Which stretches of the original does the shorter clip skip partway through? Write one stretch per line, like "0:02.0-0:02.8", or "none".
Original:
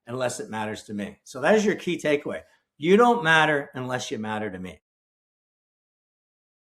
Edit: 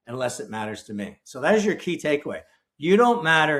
none